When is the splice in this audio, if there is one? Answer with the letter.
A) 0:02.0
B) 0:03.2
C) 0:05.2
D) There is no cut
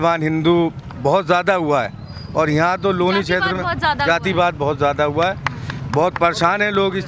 D